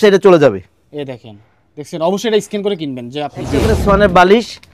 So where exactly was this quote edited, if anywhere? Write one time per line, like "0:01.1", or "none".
0:03.6